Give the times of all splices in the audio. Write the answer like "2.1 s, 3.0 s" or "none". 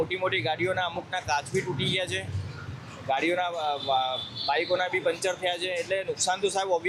none